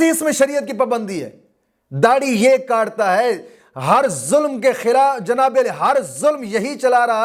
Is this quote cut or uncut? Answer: uncut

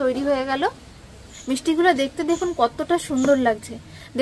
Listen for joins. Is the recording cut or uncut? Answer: cut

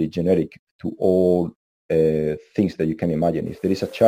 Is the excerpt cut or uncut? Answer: uncut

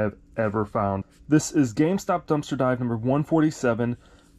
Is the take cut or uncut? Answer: cut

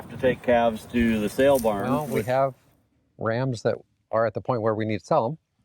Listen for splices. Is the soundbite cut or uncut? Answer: cut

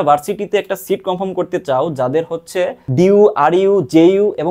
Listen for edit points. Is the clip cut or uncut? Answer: cut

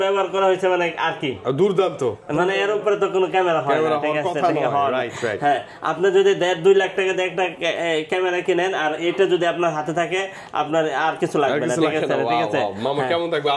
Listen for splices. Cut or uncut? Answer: uncut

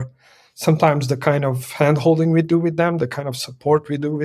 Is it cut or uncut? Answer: uncut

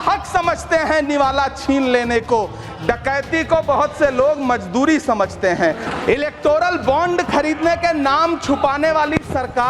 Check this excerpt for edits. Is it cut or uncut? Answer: cut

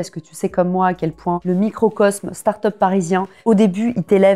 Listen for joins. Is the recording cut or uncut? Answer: cut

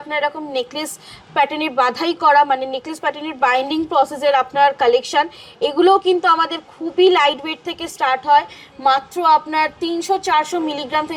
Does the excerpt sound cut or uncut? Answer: uncut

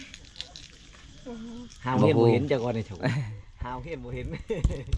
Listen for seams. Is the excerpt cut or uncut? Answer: uncut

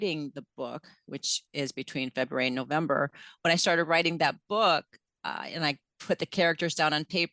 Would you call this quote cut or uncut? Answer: uncut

